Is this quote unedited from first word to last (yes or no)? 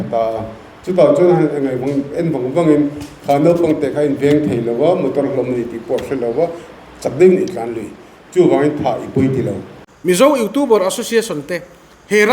no